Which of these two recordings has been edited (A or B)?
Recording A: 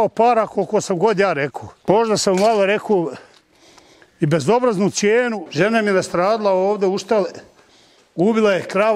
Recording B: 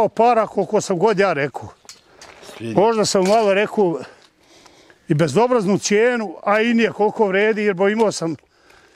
A